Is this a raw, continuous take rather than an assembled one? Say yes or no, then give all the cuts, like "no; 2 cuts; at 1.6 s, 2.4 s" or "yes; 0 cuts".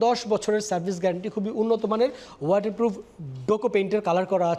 yes; 0 cuts